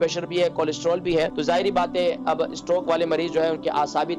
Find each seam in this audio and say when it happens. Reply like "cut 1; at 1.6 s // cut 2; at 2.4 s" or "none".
cut 1; at 1.4 s